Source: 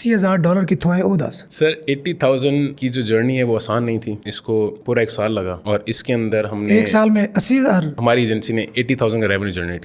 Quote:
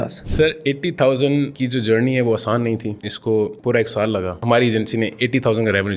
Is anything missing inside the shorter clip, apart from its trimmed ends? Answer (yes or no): yes